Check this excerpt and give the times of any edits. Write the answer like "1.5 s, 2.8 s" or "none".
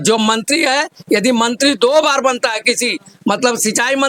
none